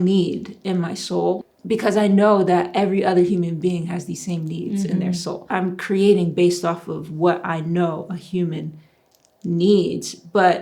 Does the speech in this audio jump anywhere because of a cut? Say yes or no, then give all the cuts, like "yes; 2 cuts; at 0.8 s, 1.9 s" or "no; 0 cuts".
yes; 2 cuts; at 1.4 s, 5.5 s